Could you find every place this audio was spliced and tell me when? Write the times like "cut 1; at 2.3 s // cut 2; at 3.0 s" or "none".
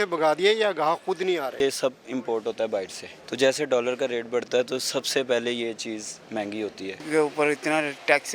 cut 1; at 1.6 s // cut 2; at 3.2 s // cut 3; at 6.9 s